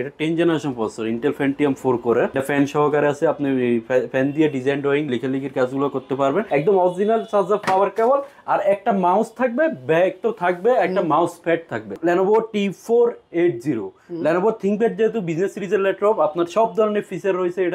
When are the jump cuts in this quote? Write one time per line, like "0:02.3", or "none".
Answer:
0:02.3
0:06.5
0:11.9